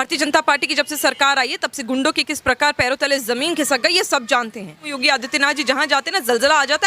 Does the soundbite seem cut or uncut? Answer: cut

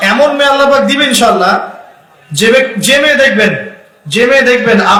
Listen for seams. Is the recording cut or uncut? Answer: uncut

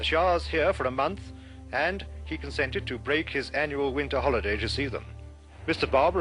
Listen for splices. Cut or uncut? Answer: cut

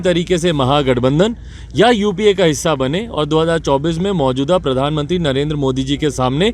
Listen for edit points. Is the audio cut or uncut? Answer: uncut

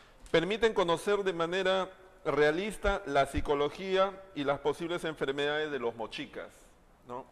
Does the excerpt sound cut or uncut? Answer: cut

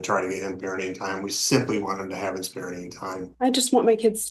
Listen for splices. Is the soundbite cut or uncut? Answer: cut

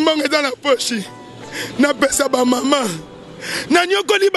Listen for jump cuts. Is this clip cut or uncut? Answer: uncut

